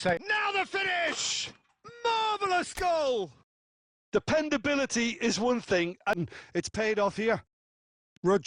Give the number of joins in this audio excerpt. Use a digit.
1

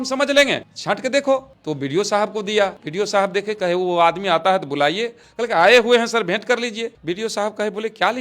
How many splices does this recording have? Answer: 2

